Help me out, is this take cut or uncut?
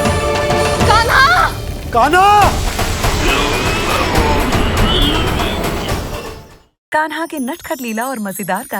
cut